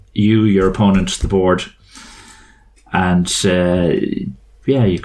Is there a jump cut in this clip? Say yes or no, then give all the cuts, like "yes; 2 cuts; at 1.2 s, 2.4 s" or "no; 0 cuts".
no; 0 cuts